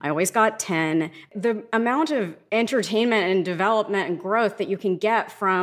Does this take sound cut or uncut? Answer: cut